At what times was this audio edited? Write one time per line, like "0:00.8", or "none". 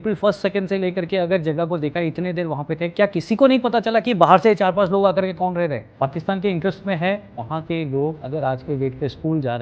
0:05.8
0:07.4
0:08.2